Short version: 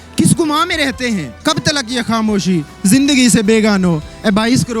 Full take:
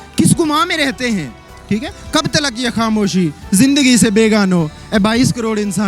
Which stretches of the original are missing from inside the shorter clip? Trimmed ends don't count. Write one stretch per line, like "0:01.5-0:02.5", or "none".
0:01.3-0:02.0